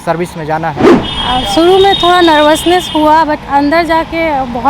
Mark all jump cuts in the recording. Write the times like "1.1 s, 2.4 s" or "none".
1.0 s